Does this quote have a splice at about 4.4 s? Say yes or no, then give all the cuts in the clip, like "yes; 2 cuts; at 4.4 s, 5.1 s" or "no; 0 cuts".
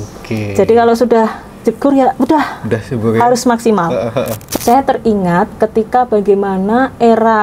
yes; 1 cut; at 4.4 s